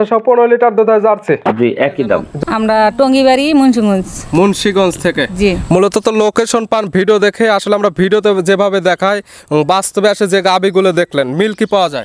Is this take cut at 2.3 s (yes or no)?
yes